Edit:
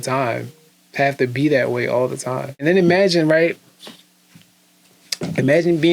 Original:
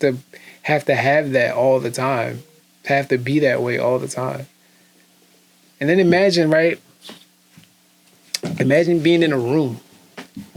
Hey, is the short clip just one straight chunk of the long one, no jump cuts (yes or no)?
no